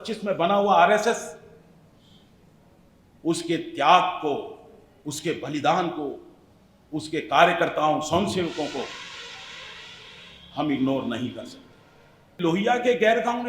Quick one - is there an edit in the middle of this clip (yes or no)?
yes